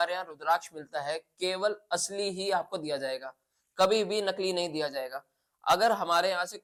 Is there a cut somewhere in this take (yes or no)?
no